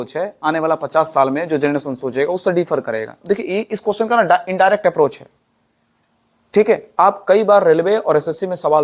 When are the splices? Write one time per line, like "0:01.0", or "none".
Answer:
0:03.2